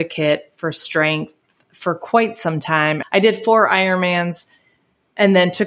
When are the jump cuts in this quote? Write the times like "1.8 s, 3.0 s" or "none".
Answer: 3.0 s